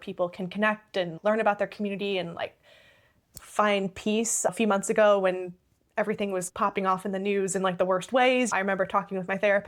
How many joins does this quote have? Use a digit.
4